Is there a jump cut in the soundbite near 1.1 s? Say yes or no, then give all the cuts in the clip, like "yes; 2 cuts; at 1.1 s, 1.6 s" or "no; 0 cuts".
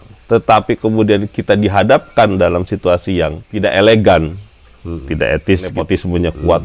no; 2 cuts; at 3.4 s, 5.8 s